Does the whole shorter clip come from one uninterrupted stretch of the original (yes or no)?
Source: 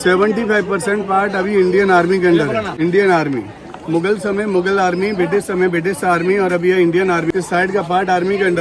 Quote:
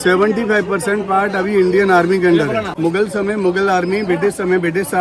no